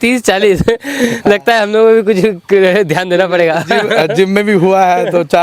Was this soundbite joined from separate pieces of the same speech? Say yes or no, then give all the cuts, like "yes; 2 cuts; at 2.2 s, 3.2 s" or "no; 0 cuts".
no; 0 cuts